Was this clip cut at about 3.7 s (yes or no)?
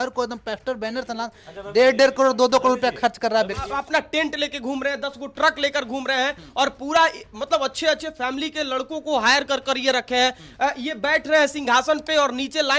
yes